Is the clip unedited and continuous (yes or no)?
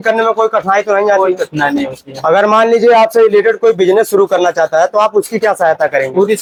yes